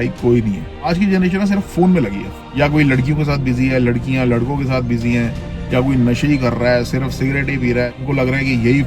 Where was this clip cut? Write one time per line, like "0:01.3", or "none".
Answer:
0:00.9
0:02.4
0:08.0

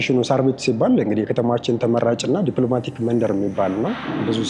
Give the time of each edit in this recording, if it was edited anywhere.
none

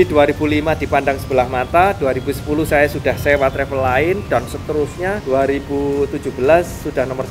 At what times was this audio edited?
none

